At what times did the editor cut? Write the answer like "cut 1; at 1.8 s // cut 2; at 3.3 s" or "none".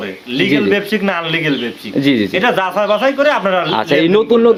none